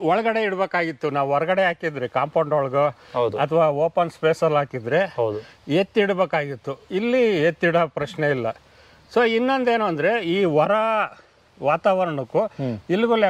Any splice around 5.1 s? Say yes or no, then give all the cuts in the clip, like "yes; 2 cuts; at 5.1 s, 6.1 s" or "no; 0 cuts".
no; 0 cuts